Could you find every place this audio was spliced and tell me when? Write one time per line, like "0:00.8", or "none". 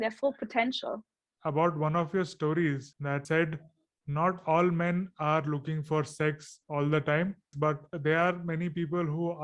0:01.3
0:03.2
0:07.9